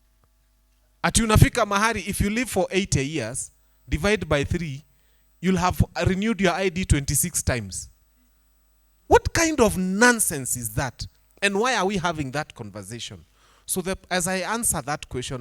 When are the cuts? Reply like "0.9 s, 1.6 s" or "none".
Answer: none